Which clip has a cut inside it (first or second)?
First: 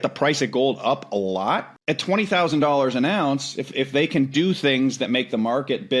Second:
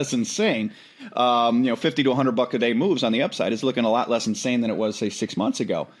first